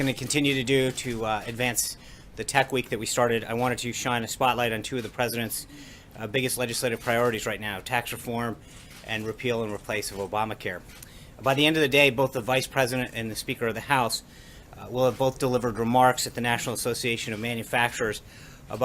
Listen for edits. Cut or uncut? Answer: cut